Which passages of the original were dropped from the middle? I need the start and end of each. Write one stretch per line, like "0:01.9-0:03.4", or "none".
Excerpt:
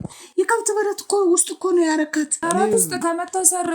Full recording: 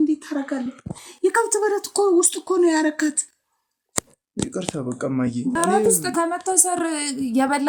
0:03.3-0:05.5